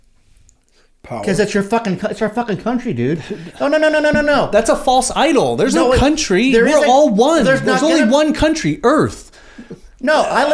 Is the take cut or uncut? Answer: uncut